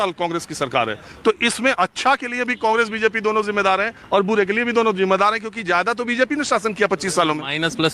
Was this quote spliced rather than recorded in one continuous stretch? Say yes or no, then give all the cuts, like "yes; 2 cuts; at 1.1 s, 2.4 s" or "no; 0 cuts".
no; 0 cuts